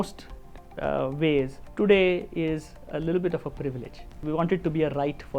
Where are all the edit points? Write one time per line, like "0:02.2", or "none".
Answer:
0:01.6
0:04.2